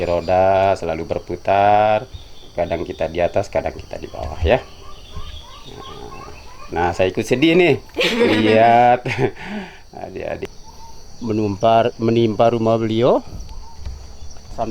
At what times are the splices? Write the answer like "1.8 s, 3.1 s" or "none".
10.4 s